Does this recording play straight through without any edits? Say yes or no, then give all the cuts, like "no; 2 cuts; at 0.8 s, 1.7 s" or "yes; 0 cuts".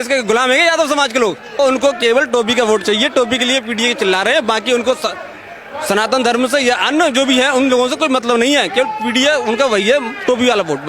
no; 1 cut; at 1.6 s